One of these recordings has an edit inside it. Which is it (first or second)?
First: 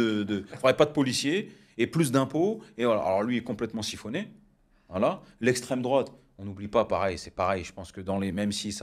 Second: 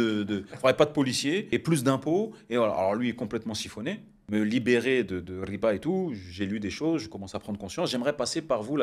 second